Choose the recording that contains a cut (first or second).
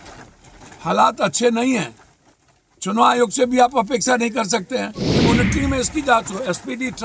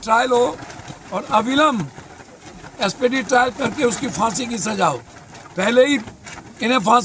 first